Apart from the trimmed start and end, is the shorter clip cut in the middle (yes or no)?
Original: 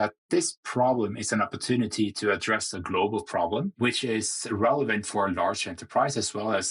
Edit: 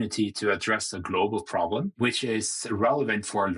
no